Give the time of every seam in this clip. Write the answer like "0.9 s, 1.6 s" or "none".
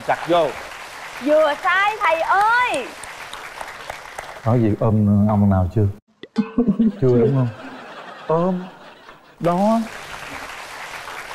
none